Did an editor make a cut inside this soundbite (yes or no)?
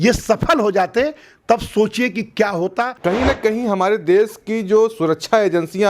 yes